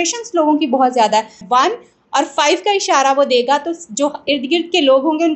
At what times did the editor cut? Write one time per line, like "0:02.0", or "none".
0:01.4